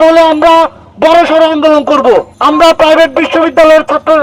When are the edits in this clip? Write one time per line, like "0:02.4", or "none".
none